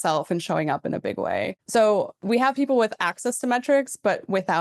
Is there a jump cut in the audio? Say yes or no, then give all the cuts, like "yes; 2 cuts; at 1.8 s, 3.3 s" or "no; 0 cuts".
yes; 2 cuts; at 1.6 s, 2.1 s